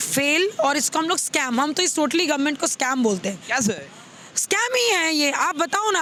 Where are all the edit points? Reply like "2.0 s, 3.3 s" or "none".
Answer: none